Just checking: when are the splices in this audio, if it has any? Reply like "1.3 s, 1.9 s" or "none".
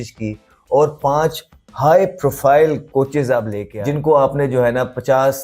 3.6 s